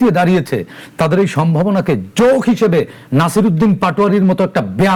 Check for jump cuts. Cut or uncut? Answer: uncut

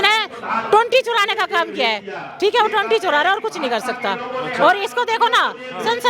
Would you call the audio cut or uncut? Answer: uncut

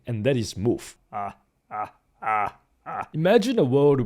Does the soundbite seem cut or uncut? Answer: cut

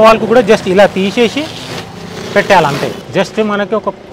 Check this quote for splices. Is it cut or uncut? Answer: uncut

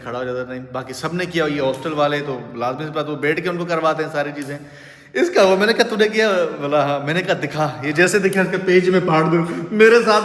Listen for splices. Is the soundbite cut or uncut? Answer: uncut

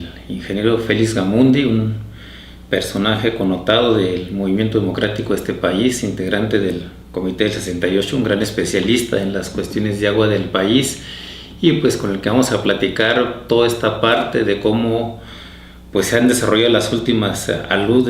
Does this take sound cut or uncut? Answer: cut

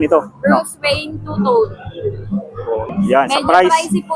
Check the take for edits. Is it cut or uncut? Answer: cut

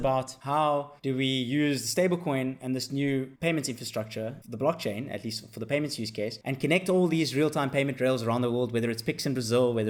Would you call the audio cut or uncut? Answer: uncut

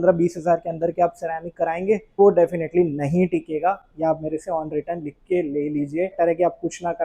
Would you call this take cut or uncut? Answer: cut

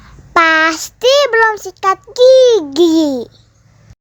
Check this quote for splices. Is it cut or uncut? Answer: uncut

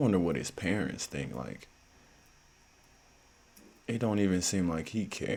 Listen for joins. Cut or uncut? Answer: uncut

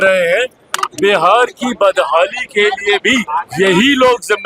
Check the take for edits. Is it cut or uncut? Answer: cut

